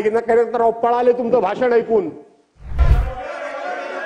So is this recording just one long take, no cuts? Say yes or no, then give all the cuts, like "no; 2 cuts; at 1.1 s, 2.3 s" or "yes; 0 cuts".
no; 1 cut; at 2.8 s